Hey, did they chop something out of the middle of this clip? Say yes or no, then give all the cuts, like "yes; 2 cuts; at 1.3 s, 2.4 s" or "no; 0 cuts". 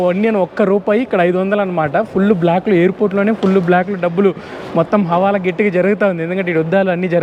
no; 0 cuts